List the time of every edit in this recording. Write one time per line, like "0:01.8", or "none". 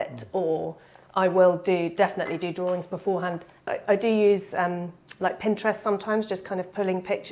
0:03.8